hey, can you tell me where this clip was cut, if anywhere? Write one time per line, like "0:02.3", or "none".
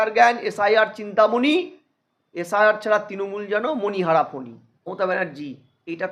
0:04.8

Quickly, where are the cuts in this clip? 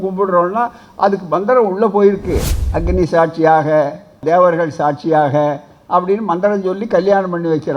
0:02.5
0:04.2

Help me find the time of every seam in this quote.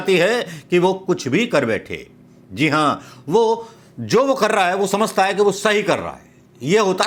none

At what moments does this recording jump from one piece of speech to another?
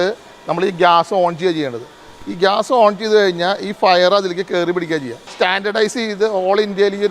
0:05.2

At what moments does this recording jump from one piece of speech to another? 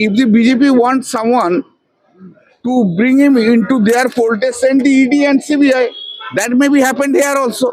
none

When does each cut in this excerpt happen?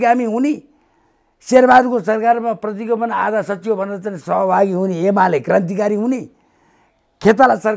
none

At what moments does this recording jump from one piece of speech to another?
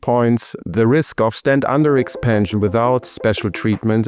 none

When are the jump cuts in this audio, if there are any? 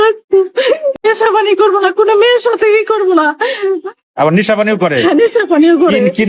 0:01.0

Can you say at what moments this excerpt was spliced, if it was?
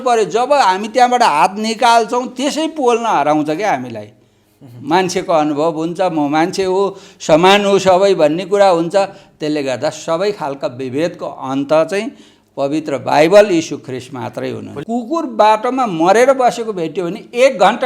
0:14.7

